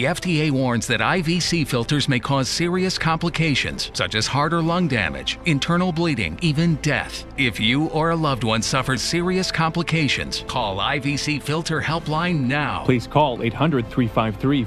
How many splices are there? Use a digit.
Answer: 0